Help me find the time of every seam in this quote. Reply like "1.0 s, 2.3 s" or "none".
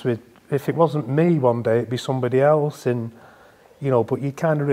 none